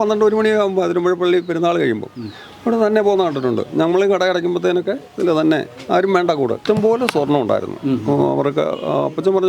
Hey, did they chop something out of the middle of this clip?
yes; 1 cut; at 6.6 s

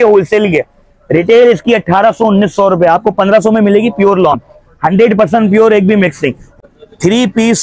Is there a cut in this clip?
yes; 1 cut; at 6.5 s

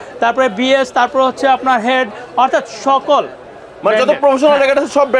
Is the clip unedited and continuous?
yes; 0 cuts

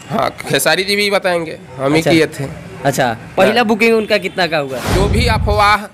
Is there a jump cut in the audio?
yes; 1 cut; at 4.8 s

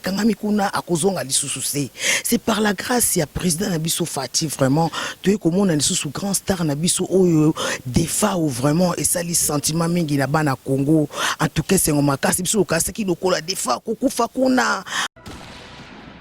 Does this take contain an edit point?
yes; 1 cut; at 15.0 s

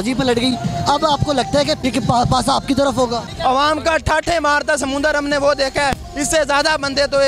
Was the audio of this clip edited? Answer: yes; 2 cuts; at 1.8 s, 3.3 s

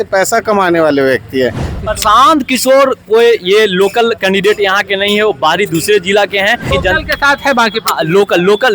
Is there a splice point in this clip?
yes; 2 cuts; at 1.8 s, 6.7 s

